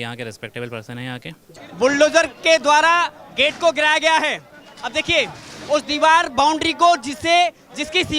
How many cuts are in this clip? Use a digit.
1